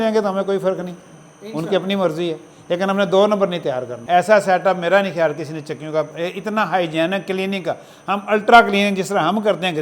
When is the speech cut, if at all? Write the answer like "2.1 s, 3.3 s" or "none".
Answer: 3.9 s